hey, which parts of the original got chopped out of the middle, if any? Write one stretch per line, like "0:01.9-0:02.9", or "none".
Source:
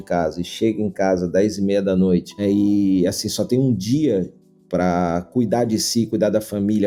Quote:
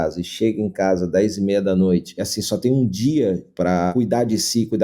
0:02.4-0:03.1
0:04.7-0:05.2